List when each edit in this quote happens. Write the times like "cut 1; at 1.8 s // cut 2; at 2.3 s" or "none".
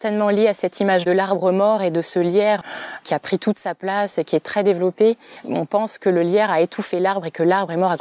cut 1; at 1.0 s // cut 2; at 2.6 s